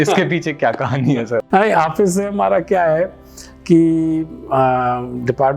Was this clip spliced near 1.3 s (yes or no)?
yes